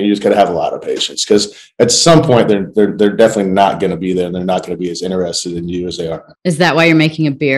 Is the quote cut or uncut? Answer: uncut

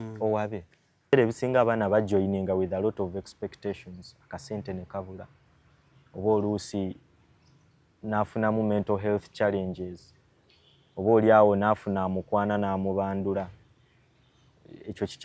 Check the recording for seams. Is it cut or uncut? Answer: cut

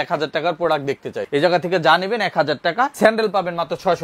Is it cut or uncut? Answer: cut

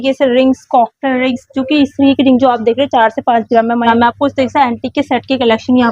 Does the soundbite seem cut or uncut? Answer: cut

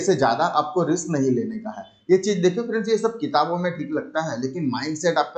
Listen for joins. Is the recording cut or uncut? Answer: uncut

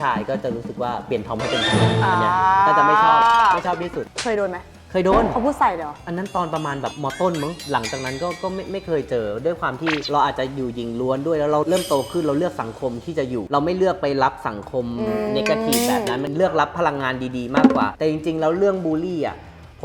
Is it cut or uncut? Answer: uncut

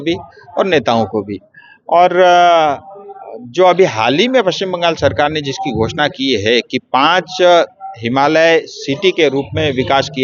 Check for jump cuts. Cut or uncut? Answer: uncut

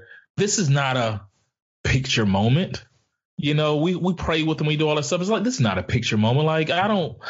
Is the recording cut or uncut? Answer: uncut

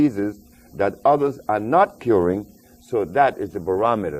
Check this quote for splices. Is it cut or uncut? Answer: uncut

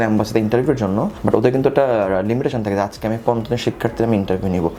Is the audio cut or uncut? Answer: uncut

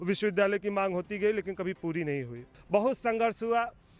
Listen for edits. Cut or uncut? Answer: cut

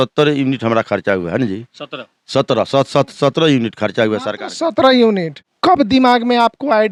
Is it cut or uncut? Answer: uncut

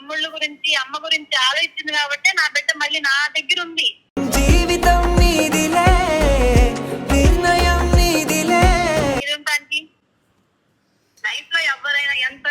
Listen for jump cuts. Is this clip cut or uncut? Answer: cut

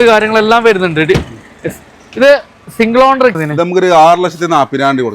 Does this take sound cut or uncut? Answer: cut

